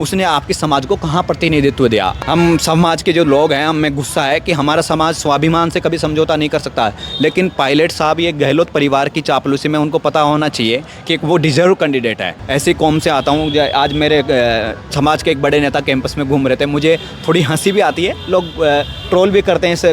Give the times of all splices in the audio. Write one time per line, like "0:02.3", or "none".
0:02.1
0:12.3